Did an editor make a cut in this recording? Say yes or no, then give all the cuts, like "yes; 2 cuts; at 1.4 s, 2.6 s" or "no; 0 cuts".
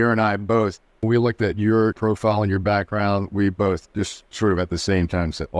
yes; 2 cuts; at 1.0 s, 1.9 s